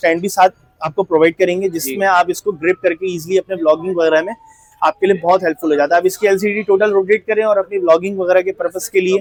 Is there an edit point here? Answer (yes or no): no